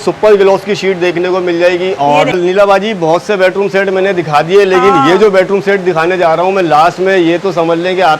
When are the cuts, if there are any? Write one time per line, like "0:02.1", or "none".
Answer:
0:02.3